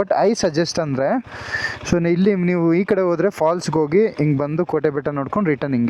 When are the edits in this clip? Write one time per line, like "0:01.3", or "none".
none